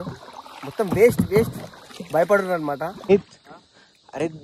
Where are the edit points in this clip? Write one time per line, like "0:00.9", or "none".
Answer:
0:03.0